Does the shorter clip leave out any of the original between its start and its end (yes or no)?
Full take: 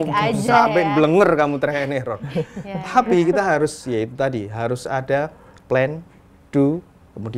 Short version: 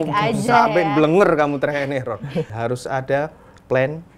yes